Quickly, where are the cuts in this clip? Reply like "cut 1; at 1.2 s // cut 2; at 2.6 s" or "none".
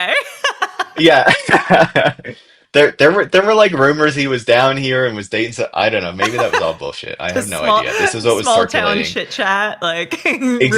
none